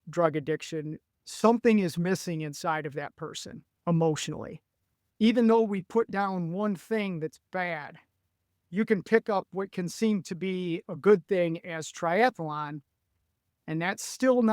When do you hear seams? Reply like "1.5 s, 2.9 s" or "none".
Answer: 1.0 s